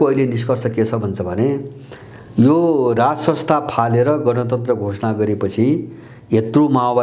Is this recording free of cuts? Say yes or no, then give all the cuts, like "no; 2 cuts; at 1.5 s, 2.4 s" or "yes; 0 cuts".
yes; 0 cuts